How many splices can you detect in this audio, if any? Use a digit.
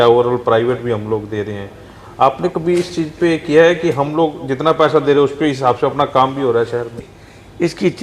1